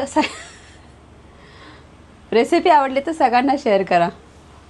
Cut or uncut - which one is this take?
uncut